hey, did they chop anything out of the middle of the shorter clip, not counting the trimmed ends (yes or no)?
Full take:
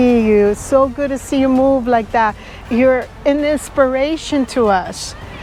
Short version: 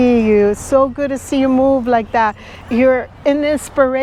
no